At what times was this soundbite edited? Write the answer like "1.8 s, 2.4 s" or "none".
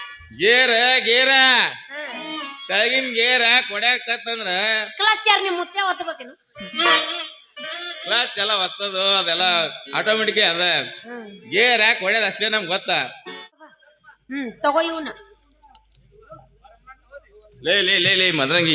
13.5 s